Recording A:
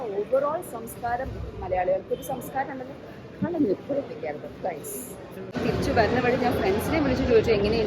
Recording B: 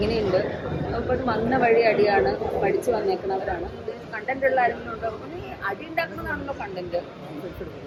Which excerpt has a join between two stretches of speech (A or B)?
A